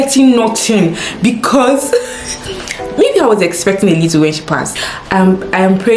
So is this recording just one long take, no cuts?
no; 1 cut; at 4.7 s

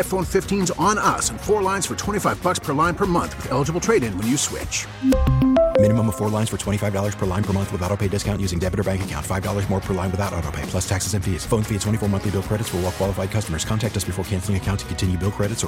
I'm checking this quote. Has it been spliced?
no; 0 cuts

